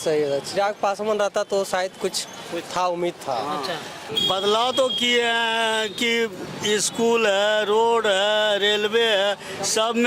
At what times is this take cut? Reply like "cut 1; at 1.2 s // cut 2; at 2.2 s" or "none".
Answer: cut 1; at 4.1 s